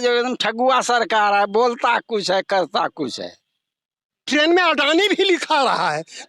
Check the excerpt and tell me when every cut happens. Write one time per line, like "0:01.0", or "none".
0:04.2